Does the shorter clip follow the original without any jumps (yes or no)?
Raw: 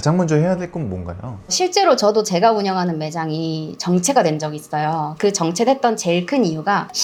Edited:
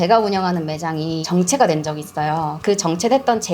no